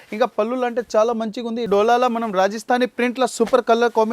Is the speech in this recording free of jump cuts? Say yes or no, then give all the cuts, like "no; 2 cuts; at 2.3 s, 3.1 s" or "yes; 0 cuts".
no; 1 cut; at 1.6 s